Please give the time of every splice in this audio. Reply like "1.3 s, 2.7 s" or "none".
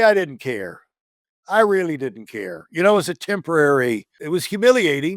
4.1 s